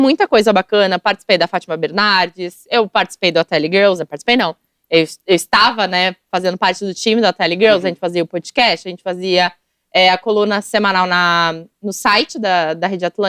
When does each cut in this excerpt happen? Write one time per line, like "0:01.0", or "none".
none